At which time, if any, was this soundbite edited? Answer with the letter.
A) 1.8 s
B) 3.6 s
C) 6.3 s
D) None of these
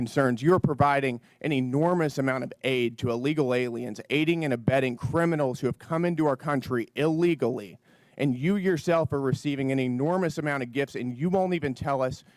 D